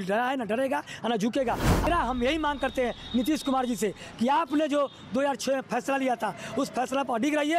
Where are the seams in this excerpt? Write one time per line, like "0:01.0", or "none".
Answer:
0:01.9